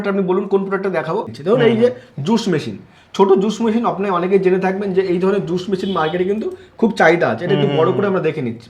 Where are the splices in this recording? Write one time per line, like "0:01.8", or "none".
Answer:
0:01.3